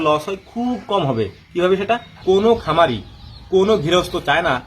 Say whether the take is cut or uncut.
cut